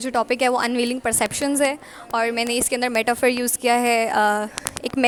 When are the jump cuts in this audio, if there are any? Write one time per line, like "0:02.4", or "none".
none